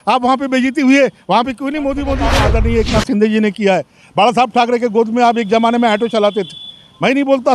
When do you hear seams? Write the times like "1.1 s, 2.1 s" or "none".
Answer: 2.3 s